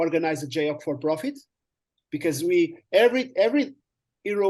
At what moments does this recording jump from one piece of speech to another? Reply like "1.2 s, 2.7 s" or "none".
none